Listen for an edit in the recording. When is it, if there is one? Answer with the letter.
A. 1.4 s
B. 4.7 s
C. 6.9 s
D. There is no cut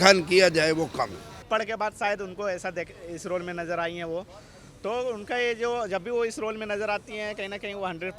A